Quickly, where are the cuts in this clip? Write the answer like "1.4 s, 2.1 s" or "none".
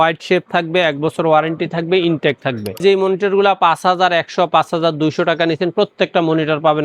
2.8 s